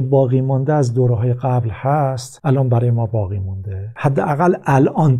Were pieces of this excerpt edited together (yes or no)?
yes